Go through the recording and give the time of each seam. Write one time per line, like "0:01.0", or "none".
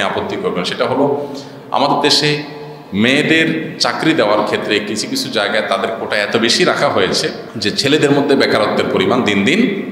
0:07.5